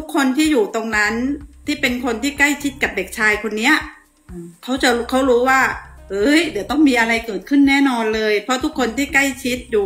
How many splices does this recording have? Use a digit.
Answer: 0